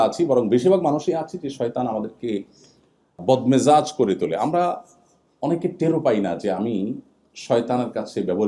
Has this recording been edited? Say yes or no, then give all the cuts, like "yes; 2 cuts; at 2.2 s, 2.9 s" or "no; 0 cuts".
yes; 1 cut; at 3.2 s